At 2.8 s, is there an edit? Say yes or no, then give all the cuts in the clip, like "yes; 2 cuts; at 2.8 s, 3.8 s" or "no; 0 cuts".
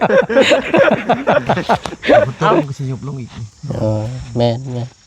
yes; 1 cut; at 2.8 s